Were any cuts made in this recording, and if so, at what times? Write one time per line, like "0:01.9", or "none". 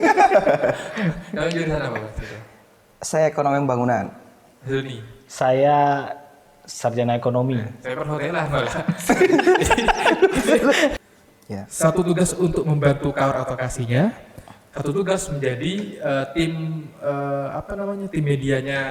0:11.0